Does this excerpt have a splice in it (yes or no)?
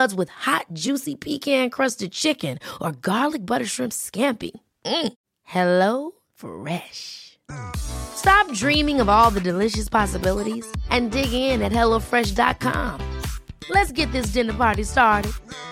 no